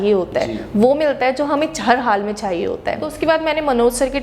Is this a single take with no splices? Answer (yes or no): no